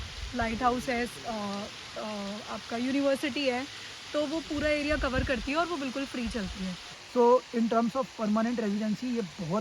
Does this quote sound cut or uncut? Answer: cut